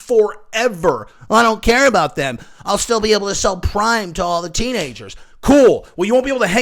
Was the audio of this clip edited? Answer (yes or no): no